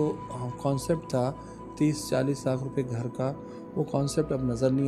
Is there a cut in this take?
no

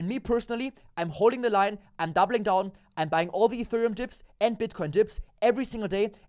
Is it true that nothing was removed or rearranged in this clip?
yes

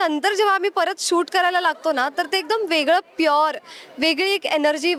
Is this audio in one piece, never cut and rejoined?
yes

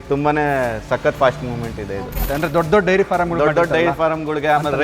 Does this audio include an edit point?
yes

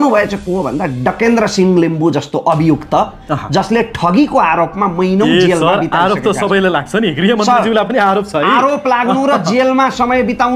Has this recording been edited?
no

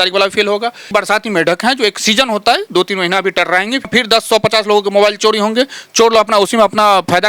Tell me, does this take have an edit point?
yes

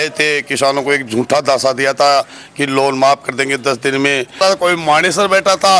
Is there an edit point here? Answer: yes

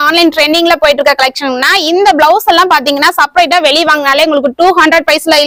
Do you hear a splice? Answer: no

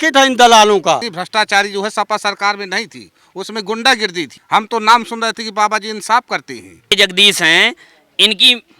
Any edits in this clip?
yes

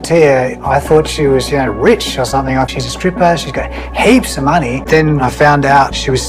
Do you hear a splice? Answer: yes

